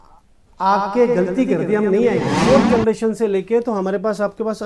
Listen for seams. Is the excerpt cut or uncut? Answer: cut